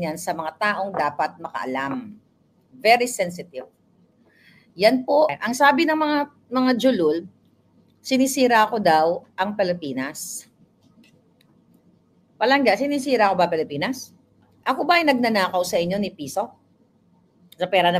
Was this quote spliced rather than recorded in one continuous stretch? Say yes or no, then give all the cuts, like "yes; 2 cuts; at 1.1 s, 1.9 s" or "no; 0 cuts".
yes; 1 cut; at 5.4 s